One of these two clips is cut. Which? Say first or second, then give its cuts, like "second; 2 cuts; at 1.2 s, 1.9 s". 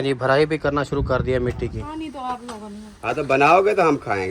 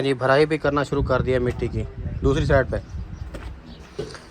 first; 1 cut; at 1.9 s